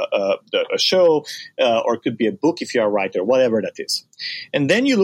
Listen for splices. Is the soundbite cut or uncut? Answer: uncut